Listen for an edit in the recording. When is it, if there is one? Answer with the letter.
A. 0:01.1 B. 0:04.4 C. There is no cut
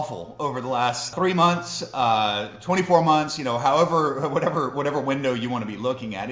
A